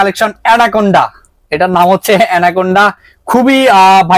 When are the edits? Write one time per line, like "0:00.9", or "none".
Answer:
none